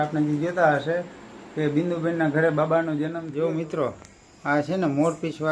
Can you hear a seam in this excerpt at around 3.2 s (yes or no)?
yes